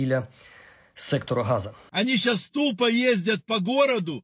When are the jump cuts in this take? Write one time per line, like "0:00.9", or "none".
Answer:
0:01.8